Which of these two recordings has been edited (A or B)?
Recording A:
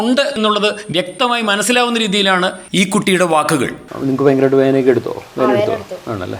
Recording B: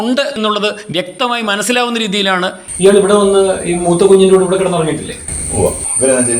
B